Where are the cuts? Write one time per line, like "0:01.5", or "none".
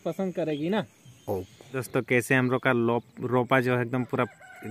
0:01.9